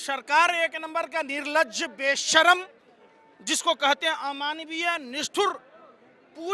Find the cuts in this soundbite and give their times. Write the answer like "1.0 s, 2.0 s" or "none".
none